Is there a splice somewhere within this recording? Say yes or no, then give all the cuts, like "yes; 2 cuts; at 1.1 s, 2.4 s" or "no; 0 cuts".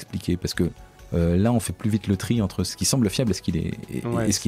yes; 2 cuts; at 0.9 s, 2.8 s